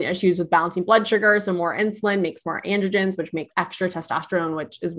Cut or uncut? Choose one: cut